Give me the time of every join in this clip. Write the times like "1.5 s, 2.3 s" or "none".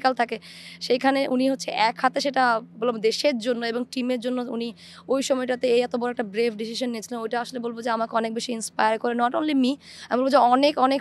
none